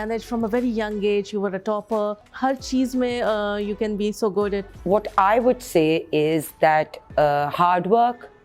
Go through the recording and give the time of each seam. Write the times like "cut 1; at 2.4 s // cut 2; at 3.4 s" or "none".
cut 1; at 2.3 s // cut 2; at 4.7 s